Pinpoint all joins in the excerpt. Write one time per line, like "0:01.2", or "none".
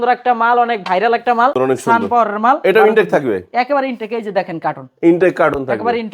0:01.5